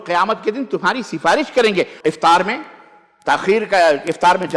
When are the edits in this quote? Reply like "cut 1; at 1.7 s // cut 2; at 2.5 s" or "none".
cut 1; at 1.9 s